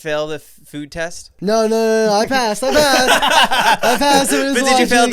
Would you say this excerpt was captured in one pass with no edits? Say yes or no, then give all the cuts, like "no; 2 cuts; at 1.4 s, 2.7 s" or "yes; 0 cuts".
no; 1 cut; at 1.2 s